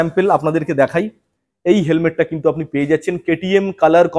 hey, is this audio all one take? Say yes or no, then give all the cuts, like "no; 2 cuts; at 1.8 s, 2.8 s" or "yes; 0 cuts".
yes; 0 cuts